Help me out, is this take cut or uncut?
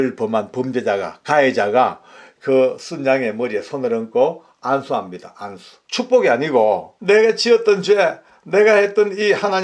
cut